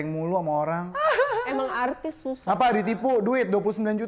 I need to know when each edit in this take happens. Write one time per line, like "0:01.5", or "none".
none